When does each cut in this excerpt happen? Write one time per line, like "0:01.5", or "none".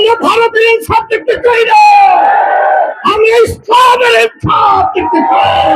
none

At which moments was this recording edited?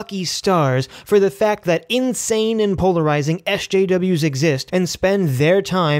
0:04.6

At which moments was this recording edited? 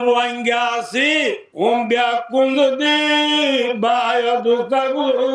0:01.5

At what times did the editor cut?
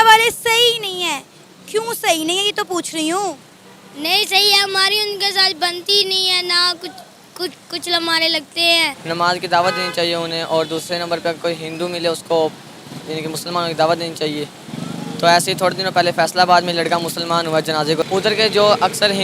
0:09.0
0:18.0

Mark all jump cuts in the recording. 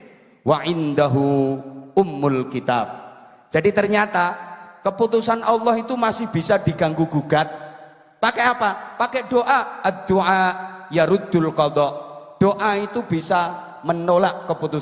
none

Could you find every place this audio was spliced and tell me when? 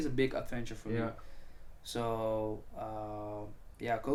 none

